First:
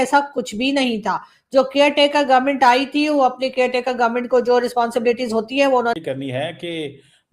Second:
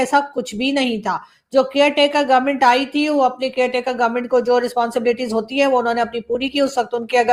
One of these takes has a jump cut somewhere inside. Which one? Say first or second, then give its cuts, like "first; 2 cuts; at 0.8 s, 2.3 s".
first; 1 cut; at 5.9 s